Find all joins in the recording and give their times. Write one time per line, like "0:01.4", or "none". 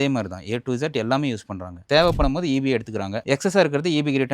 0:01.7